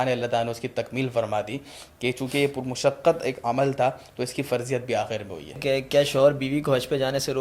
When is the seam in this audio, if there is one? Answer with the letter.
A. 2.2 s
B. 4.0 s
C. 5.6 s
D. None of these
C